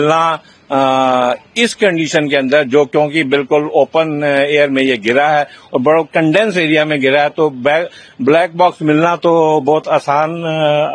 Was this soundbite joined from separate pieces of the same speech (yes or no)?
no